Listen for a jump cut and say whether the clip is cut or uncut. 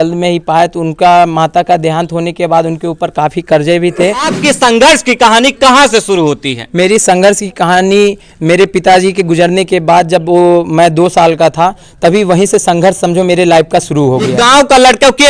cut